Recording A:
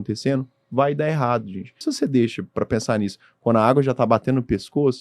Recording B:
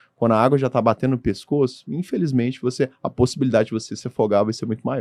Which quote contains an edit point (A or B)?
A